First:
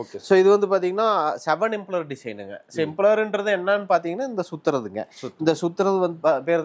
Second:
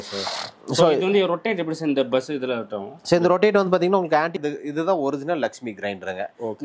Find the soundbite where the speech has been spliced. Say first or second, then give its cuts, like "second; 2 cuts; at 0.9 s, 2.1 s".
second; 1 cut; at 4.4 s